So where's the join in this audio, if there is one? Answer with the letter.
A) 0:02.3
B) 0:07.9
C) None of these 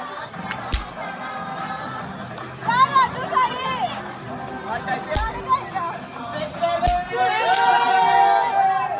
C